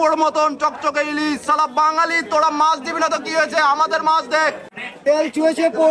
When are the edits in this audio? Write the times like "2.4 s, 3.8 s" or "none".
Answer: 4.8 s